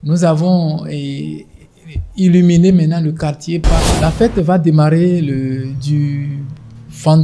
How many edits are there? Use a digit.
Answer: 1